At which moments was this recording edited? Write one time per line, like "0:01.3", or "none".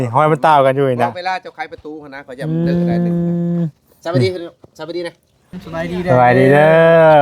0:05.5